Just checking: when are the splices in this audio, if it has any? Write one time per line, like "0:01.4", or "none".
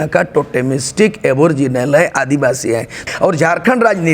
0:03.0